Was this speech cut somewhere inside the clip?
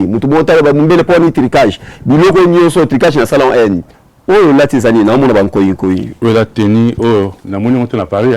yes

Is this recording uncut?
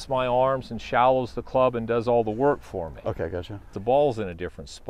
no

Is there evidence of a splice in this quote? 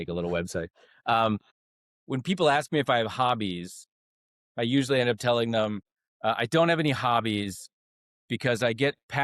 yes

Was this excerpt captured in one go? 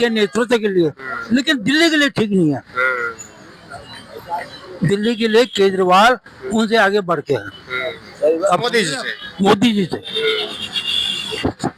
yes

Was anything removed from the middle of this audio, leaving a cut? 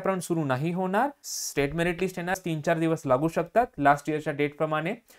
yes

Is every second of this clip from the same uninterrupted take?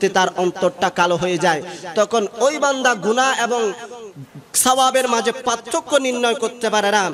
yes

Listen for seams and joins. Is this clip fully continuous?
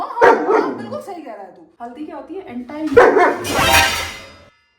no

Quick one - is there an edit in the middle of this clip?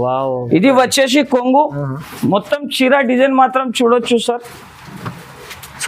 no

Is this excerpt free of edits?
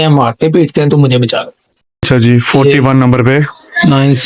no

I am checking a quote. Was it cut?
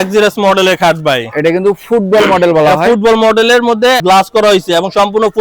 yes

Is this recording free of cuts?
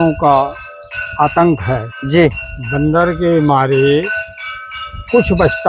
yes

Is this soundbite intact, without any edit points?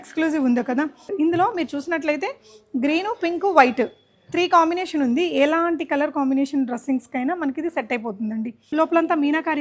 no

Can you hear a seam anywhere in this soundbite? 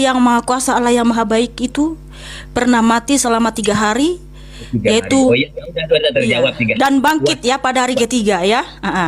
yes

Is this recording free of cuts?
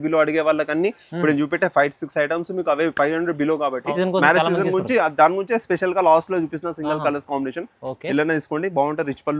no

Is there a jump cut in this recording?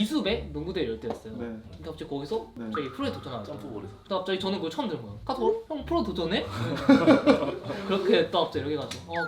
yes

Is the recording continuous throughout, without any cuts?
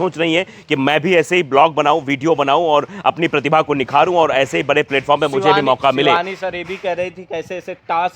yes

